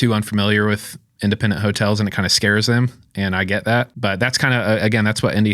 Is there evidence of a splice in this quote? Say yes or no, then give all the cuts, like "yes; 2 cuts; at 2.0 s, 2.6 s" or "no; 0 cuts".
yes; 1 cut; at 3.9 s